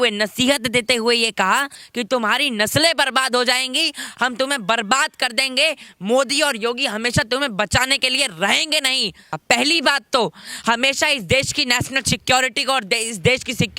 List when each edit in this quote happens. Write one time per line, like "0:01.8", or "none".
0:01.8
0:09.4